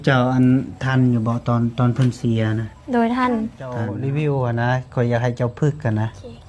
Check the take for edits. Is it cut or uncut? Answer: cut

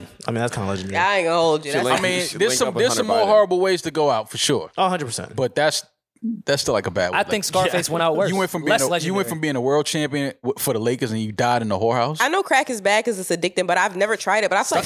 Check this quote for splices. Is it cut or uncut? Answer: cut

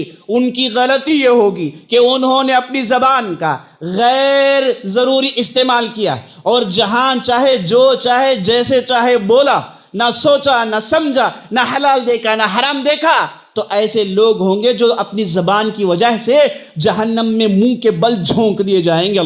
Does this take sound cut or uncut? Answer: uncut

